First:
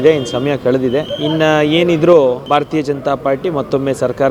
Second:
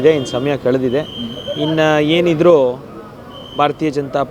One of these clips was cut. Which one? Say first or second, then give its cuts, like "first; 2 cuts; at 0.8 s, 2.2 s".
first; 2 cuts; at 1.1 s, 2.4 s